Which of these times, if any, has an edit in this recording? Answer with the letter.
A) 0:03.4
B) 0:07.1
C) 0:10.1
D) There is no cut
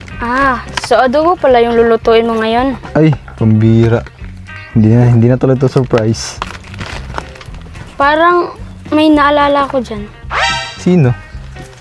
D